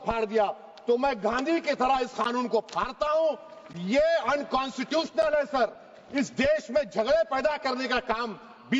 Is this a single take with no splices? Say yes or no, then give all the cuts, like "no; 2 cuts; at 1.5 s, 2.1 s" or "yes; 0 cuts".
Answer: yes; 0 cuts